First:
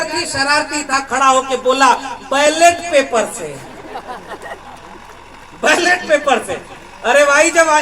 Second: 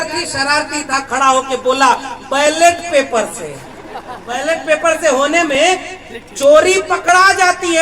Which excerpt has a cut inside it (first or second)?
second